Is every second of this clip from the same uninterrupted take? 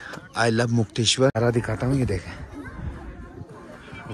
no; 1 cut; at 1.4 s

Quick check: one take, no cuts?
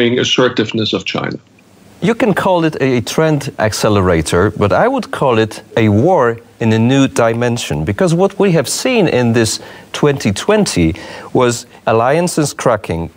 yes; 0 cuts

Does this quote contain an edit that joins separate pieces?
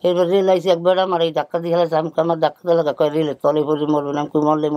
no; 0 cuts

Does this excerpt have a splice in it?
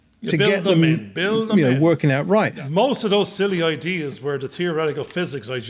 yes; 1 cut; at 2.6 s

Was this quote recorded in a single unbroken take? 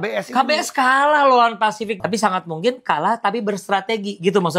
no; 1 cut; at 2.0 s

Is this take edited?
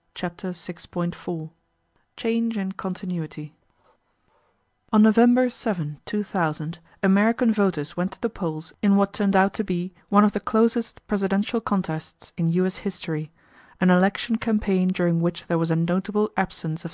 no; 0 cuts

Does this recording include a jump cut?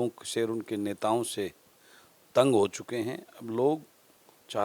no; 0 cuts

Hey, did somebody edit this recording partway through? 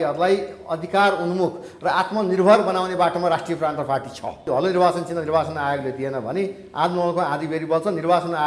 yes; 1 cut; at 4.4 s

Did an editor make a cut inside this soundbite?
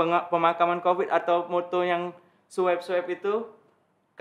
no; 0 cuts

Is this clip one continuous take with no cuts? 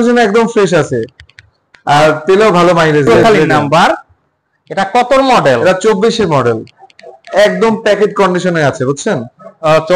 no; 1 cut; at 3.1 s

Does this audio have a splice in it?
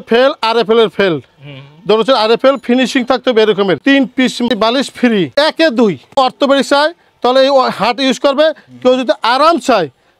yes; 3 cuts; at 3.8 s, 5.3 s, 6.1 s

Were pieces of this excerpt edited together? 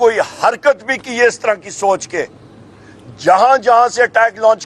no; 0 cuts

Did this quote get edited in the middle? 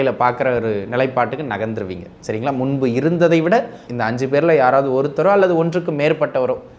yes; 1 cut; at 3.8 s

